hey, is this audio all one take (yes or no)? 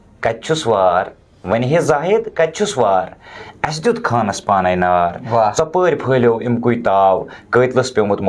yes